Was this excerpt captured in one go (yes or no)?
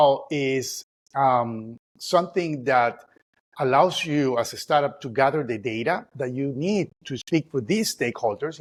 yes